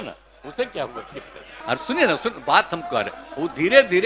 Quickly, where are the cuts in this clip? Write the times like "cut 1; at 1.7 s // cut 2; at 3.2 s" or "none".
cut 1; at 1.4 s